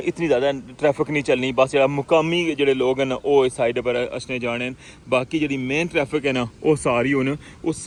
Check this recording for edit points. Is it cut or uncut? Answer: uncut